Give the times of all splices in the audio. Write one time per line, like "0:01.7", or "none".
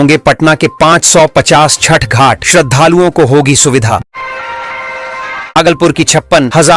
0:04.1
0:05.5